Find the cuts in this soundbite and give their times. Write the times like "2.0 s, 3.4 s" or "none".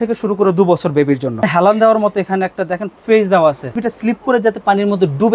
1.5 s, 3.9 s